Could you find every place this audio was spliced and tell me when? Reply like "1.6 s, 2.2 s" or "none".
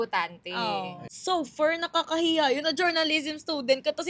1.0 s